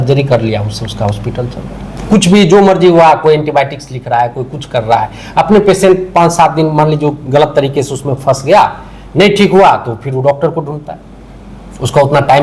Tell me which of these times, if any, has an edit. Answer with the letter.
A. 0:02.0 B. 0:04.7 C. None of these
A